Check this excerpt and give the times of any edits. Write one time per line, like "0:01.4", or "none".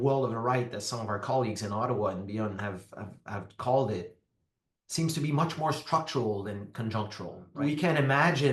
0:07.4